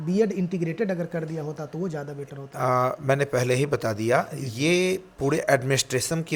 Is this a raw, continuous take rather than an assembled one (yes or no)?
yes